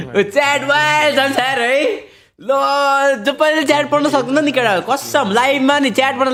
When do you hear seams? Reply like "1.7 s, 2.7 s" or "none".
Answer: none